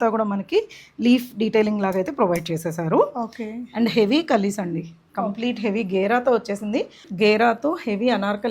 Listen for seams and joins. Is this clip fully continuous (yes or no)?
no